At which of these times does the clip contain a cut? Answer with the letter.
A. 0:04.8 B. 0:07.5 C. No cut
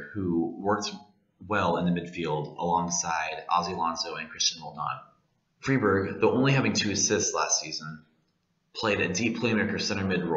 B